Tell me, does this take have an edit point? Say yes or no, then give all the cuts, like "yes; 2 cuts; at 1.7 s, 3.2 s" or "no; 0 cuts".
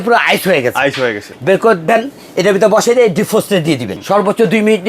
yes; 2 cuts; at 1.3 s, 3.9 s